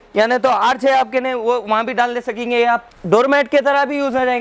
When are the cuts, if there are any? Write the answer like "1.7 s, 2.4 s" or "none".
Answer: 2.9 s